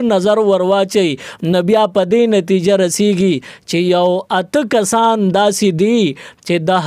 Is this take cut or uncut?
uncut